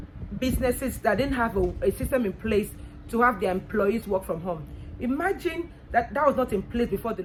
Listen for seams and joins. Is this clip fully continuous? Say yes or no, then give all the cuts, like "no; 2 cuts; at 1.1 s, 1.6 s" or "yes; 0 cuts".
yes; 0 cuts